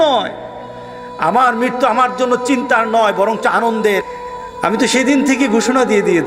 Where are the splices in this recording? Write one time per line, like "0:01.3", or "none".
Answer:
0:04.0